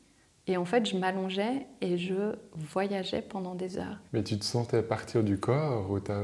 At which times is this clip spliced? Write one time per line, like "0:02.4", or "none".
0:04.0